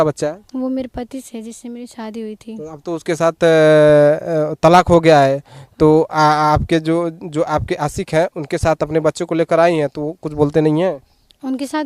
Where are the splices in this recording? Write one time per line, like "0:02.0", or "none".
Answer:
none